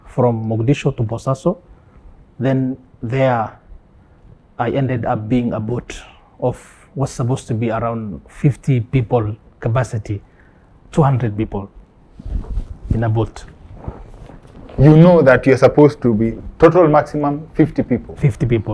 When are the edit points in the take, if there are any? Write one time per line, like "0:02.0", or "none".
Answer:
none